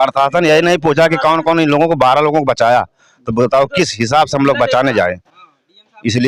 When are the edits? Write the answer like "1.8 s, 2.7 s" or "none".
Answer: none